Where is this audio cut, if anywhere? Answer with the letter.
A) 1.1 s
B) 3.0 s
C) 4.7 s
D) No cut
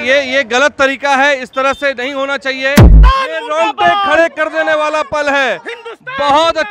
B